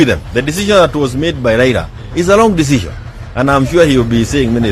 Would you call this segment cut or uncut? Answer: uncut